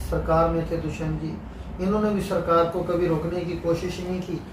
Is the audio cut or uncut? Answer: uncut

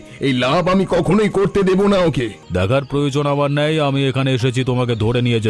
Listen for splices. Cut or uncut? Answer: cut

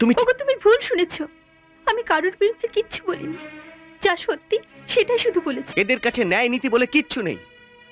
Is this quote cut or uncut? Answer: cut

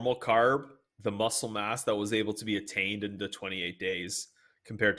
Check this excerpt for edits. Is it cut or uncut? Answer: uncut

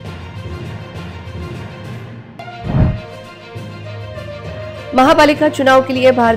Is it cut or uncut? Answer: uncut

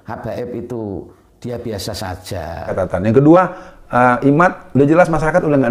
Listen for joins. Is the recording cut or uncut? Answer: cut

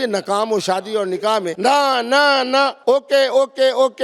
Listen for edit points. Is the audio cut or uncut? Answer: cut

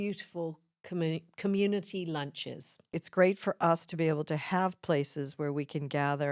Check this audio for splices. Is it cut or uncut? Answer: cut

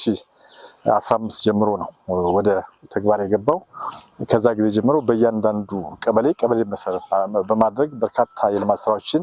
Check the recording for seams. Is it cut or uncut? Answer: uncut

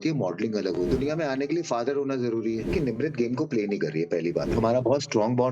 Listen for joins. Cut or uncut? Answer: cut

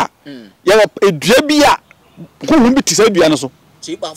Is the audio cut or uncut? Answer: uncut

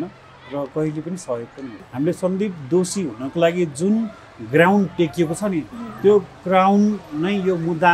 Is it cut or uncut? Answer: cut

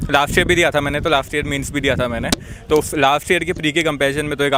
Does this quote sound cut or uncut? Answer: uncut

